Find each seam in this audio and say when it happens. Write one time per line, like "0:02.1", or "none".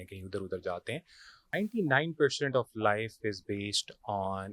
0:01.6